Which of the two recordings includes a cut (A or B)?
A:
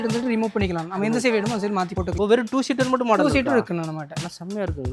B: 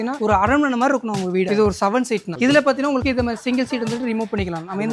A